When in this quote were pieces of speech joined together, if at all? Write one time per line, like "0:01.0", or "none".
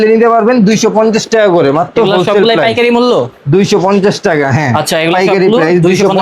none